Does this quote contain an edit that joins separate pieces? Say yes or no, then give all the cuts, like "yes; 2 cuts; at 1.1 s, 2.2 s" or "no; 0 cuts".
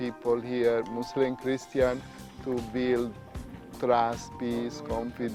no; 0 cuts